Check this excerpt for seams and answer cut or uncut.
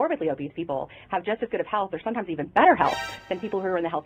uncut